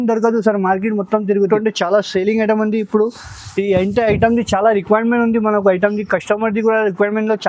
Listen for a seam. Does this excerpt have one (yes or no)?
yes